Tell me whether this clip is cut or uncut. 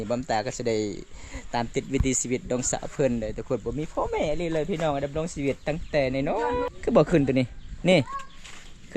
cut